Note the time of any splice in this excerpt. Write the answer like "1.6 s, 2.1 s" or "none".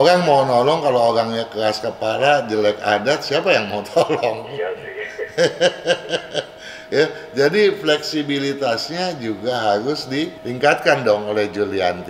10.4 s

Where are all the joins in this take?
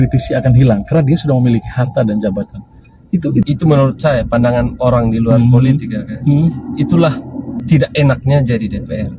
3.4 s, 7.6 s

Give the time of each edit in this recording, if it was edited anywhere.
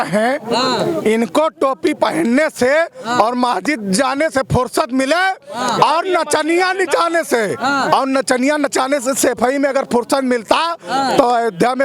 none

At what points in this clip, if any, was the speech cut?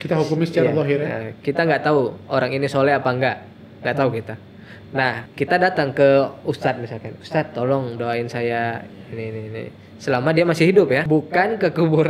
5.2 s, 11.0 s

